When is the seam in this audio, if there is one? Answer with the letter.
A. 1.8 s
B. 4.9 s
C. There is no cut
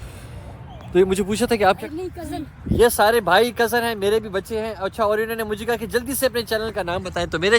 A